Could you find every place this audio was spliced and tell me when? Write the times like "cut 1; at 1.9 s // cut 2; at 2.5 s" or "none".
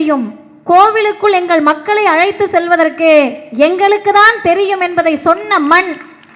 none